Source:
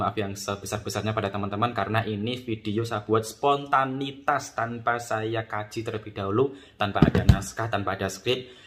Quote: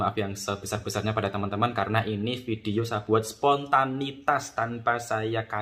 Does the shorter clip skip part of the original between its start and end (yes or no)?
no